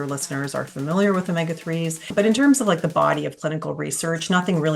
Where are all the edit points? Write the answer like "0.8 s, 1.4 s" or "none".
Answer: 2.1 s